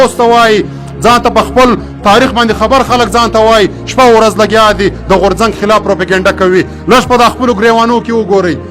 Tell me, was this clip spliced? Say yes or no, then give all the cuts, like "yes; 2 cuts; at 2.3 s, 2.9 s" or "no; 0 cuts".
no; 0 cuts